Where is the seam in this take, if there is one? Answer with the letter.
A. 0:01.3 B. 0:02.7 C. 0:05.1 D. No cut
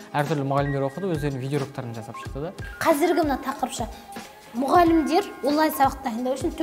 B